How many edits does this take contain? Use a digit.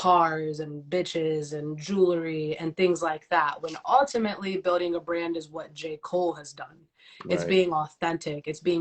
0